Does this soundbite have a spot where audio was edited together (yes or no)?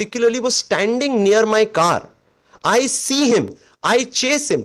no